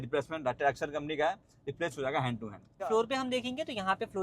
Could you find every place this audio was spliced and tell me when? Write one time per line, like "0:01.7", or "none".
0:02.8